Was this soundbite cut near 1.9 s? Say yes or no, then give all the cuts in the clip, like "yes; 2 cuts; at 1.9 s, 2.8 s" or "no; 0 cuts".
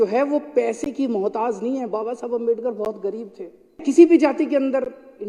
no; 1 cut; at 3.8 s